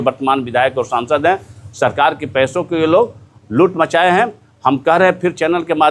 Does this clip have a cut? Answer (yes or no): no